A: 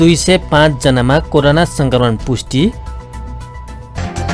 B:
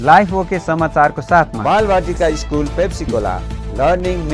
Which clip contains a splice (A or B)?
B